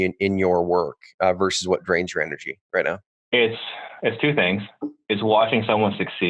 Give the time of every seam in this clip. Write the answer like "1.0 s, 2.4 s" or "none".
3.1 s